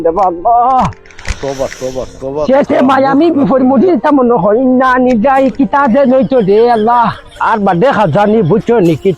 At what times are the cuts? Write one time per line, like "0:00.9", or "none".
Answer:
none